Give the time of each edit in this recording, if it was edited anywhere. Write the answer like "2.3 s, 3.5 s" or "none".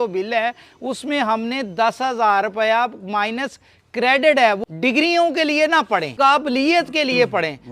4.7 s, 6.1 s